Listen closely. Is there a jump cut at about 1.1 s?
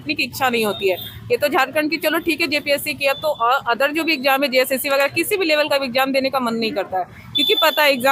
no; 0 cuts

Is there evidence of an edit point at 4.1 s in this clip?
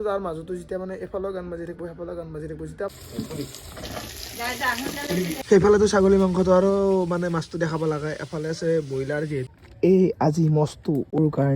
no; 3 cuts; at 2.9 s, 5.5 s, 9.5 s

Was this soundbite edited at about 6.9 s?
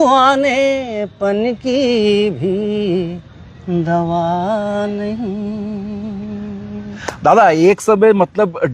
no; 0 cuts

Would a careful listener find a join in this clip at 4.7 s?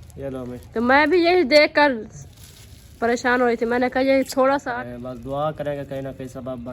yes; 1 cut; at 4.7 s

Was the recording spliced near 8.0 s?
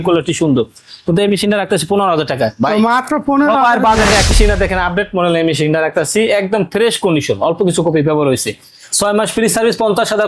no; 1 cut; at 4.3 s

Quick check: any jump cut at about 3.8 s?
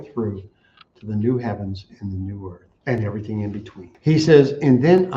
yes; 2 cuts; at 2.7 s, 3.8 s

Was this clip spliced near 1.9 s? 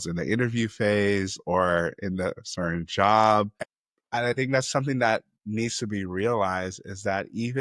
no; 1 cut; at 3.5 s

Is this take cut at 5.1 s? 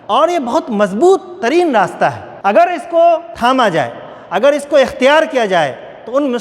no; 2 cuts; at 2.3 s, 3.3 s

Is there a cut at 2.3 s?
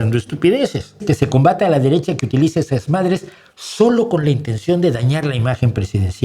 no; 1 cut; at 1.0 s

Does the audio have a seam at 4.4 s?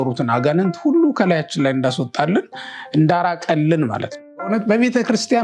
yes; 1 cut; at 4.4 s

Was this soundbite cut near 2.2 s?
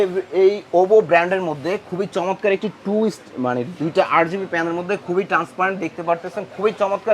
no; 0 cuts

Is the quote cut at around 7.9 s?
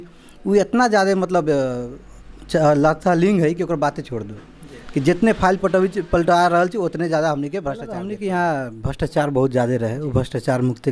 yes; 1 cut; at 7.9 s

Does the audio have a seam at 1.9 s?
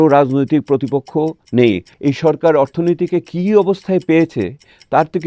yes; 1 cut; at 1.9 s

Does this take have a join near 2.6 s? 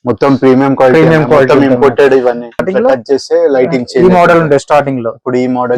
yes; 1 cut; at 2.6 s

